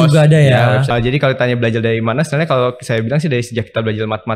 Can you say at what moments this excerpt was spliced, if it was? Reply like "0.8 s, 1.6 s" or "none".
0.9 s